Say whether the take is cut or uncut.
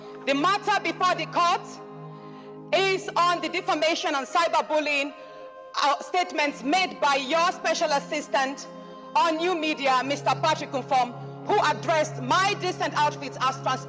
uncut